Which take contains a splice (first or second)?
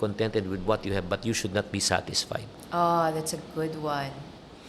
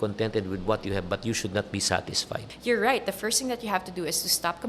second